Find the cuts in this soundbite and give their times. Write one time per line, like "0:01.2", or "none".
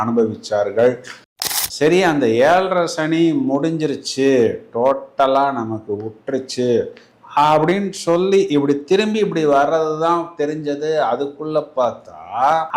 0:01.3